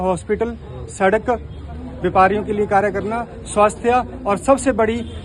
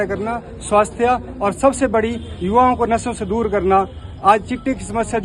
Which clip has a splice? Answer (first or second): first